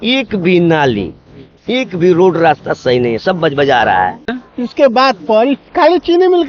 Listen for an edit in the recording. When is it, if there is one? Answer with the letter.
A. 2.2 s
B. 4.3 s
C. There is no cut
B